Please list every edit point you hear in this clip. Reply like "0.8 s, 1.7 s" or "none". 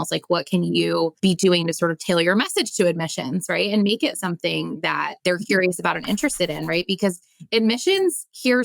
1.1 s, 5.1 s